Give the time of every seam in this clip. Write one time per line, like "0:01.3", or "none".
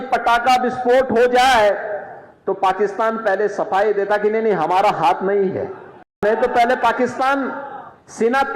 0:06.2